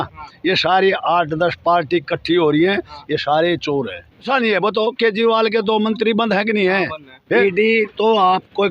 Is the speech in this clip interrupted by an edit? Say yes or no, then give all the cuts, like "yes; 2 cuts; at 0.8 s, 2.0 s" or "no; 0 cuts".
yes; 2 cuts; at 4.2 s, 7.4 s